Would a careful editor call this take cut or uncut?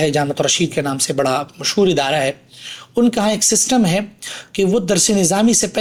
uncut